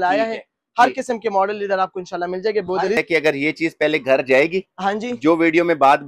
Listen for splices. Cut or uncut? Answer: cut